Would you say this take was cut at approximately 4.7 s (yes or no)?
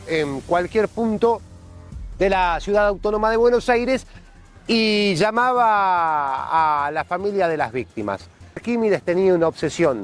no